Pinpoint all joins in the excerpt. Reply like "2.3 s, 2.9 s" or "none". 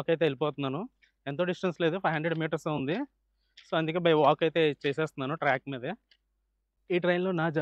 none